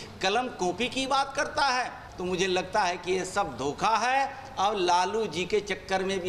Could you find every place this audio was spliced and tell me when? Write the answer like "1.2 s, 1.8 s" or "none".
2.1 s